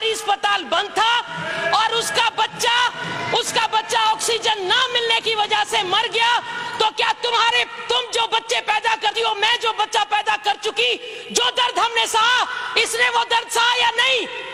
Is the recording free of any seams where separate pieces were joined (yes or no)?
yes